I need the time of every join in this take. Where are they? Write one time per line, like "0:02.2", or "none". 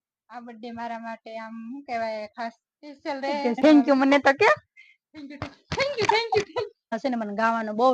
0:03.6
0:07.0